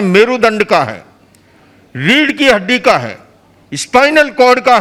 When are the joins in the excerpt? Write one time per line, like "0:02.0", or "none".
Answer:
none